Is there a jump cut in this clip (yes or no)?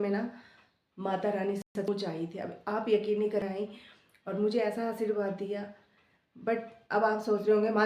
yes